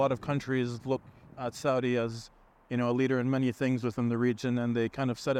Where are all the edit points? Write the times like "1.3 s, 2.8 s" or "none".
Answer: none